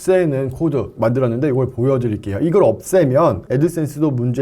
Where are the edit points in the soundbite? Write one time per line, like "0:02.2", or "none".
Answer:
0:00.9
0:03.4